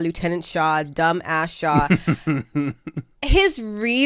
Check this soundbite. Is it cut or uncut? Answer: uncut